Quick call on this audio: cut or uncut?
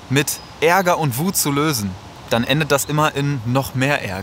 cut